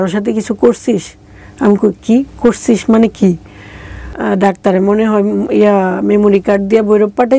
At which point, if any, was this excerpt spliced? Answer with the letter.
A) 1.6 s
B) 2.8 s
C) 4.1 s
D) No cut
C